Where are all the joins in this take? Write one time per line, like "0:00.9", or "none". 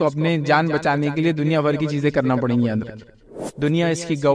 0:03.3